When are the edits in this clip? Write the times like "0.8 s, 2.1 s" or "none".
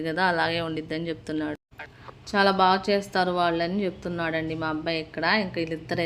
none